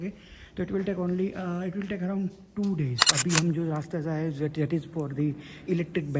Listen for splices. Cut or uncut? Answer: cut